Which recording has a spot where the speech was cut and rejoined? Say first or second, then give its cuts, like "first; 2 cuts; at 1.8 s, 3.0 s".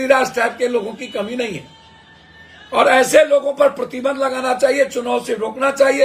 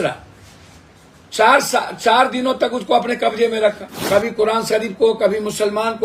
second; 1 cut; at 3.9 s